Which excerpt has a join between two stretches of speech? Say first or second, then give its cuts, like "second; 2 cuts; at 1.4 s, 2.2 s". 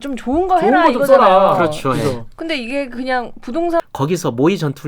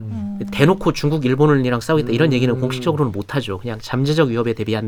first; 1 cut; at 3.8 s